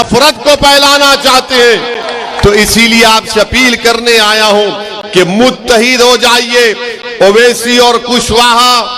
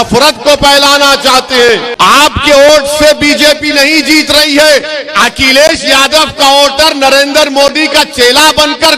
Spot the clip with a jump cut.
second; 1 cut; at 1.9 s

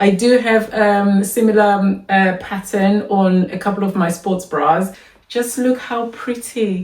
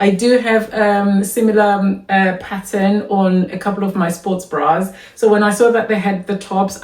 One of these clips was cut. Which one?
first; 1 cut; at 5.0 s

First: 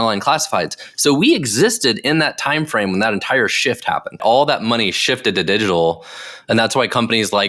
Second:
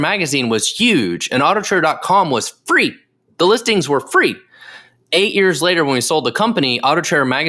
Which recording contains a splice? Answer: first; 1 cut; at 4.2 s

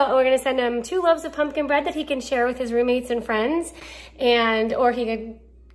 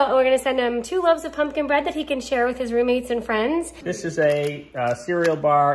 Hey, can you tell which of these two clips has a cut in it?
second; 1 cut; at 3.8 s

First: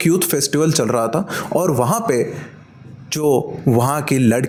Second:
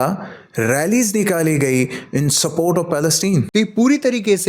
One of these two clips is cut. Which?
second; 1 cut; at 3.5 s

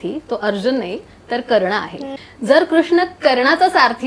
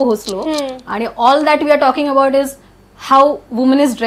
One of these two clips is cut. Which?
first; 1 cut; at 2.1 s

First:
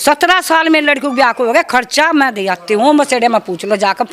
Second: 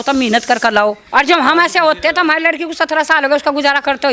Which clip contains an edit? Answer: second; 1 cut; at 1.0 s

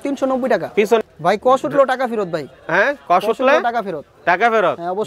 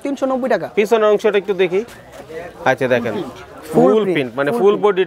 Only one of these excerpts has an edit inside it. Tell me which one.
first; 1 cut; at 1.0 s

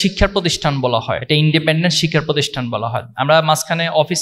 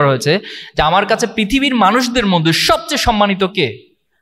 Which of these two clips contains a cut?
first; 1 cut; at 1.2 s

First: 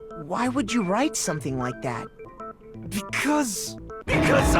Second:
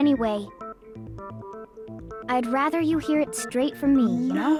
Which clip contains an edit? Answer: first; 1 cut; at 2.3 s

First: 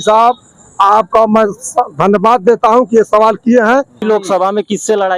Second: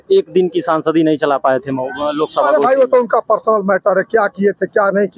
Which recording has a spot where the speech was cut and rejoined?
first; 1 cut; at 4.0 s

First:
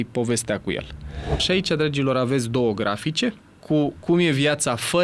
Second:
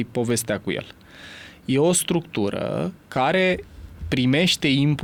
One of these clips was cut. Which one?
first; 2 cuts; at 1.4 s, 3.5 s

